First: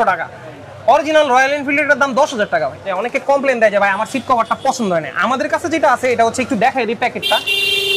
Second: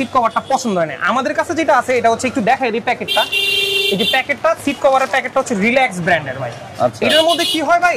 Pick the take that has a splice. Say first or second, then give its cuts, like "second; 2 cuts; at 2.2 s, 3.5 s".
first; 1 cut; at 3.0 s